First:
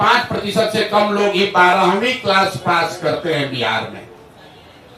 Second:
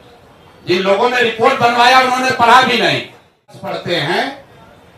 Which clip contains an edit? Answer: second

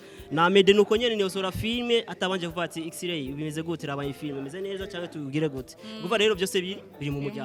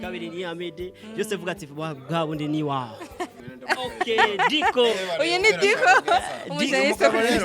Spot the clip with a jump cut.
second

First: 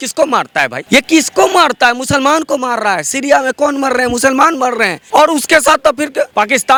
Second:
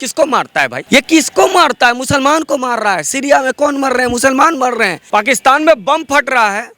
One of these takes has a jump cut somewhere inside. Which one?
second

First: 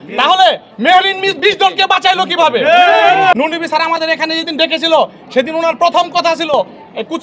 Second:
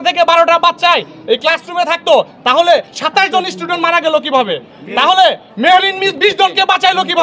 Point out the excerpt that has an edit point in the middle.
first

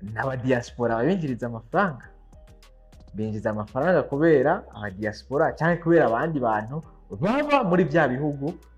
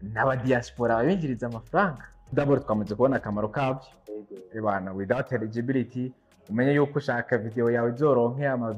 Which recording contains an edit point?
second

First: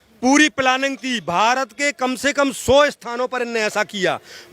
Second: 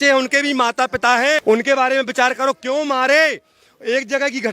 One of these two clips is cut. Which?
second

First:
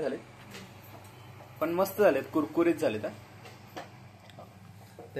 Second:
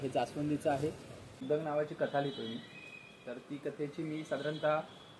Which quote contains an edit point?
second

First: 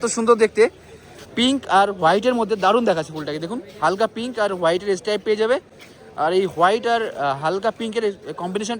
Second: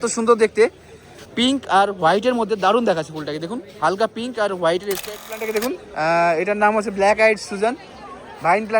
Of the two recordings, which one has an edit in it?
second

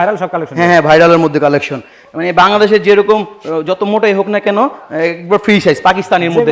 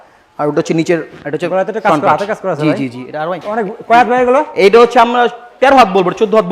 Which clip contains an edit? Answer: second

